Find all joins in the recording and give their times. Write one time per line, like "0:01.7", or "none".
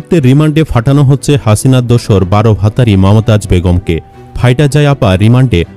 none